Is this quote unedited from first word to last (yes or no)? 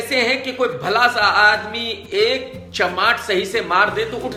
yes